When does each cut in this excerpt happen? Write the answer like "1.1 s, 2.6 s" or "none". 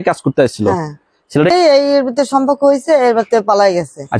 1.5 s